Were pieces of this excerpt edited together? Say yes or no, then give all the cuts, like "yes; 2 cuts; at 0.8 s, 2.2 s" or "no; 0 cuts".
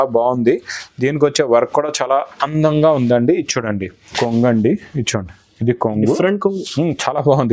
yes; 1 cut; at 4.1 s